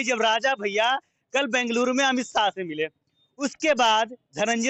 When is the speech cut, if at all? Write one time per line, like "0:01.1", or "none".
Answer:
none